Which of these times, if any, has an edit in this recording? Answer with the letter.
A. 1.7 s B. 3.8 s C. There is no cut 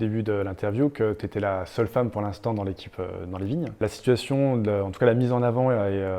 B